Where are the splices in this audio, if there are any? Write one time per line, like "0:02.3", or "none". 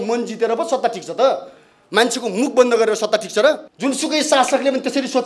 0:03.7